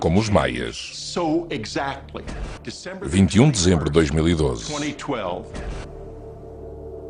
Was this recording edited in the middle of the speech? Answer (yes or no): yes